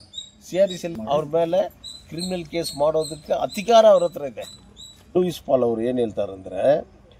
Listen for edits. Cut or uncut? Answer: cut